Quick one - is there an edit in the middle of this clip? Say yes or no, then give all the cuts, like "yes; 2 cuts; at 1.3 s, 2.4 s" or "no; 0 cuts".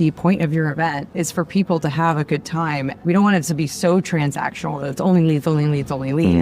yes; 2 cuts; at 1.1 s, 2.9 s